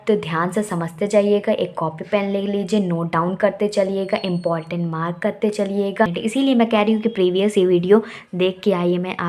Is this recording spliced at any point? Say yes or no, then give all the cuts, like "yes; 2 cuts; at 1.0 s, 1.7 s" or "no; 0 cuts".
yes; 1 cut; at 6.1 s